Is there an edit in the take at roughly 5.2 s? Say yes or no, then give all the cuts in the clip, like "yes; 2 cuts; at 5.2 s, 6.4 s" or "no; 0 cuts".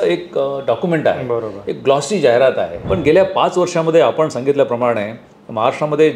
no; 1 cut; at 2.8 s